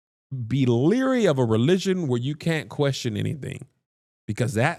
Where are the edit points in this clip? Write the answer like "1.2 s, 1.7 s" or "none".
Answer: none

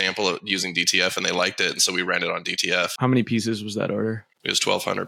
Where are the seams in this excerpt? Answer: 3.0 s

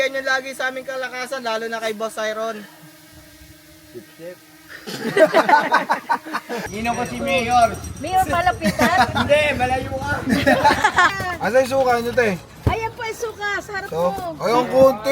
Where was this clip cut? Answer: 6.6 s, 11.1 s

